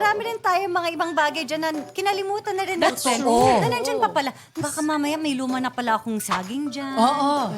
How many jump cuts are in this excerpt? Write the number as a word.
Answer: one